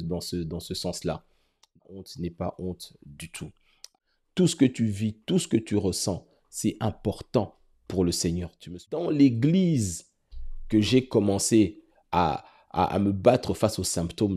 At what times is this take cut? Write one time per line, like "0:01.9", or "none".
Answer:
0:01.8
0:03.9
0:09.0